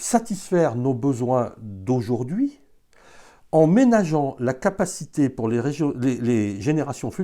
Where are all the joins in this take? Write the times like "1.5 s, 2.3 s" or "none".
none